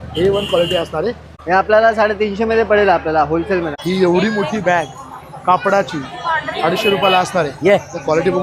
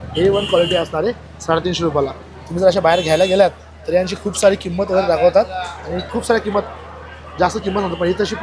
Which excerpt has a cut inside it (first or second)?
first